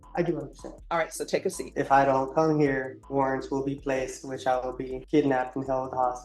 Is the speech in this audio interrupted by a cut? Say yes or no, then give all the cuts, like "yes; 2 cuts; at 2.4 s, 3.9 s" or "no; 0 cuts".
yes; 3 cuts; at 1.6 s, 3.0 s, 5.0 s